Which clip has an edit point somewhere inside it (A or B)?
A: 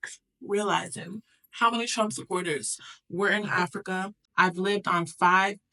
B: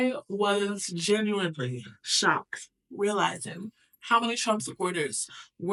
A